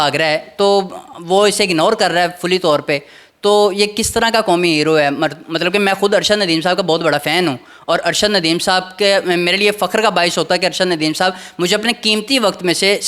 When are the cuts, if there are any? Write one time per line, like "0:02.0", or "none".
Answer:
none